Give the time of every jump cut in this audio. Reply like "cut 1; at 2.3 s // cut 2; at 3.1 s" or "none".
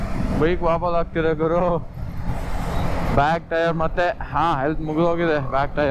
none